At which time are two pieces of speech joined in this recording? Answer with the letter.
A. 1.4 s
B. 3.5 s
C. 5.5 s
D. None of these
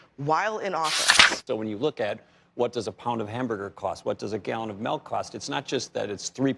A